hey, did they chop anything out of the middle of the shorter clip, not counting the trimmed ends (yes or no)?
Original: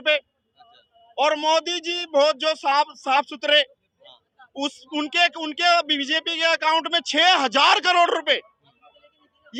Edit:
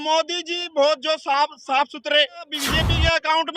yes